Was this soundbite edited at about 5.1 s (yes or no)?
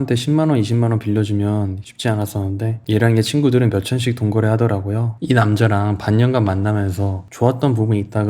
yes